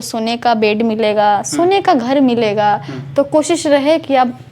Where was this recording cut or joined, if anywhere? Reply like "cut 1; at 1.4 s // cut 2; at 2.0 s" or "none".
none